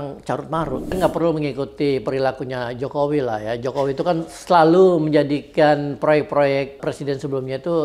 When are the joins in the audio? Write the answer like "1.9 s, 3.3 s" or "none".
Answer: 1.0 s, 4.3 s, 6.8 s